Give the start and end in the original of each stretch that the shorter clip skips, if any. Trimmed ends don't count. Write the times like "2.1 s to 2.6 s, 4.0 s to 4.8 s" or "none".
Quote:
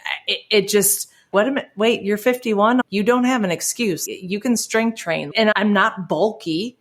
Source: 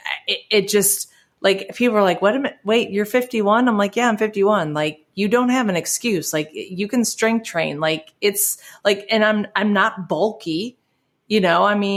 1.3 s to 2.2 s, 3.7 s to 5.1 s, 6.3 s to 6.5 s, 7.9 s to 9.5 s